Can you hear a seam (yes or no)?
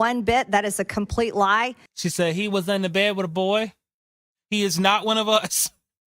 yes